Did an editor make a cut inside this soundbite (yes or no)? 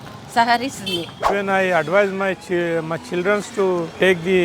yes